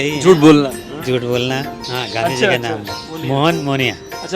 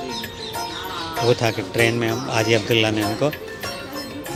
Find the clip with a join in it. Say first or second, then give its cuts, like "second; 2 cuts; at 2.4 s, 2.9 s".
first; 1 cut; at 1.8 s